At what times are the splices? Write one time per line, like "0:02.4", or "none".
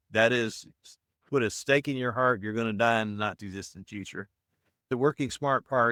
none